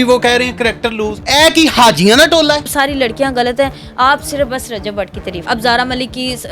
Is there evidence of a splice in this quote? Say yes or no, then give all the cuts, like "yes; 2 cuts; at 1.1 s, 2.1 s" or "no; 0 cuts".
yes; 3 cuts; at 1.2 s, 2.7 s, 5.5 s